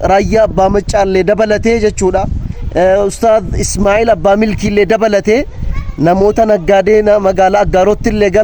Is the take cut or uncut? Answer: uncut